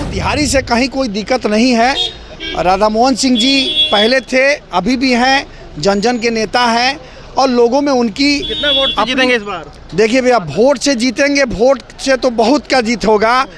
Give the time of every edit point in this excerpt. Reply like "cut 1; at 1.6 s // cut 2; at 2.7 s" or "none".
none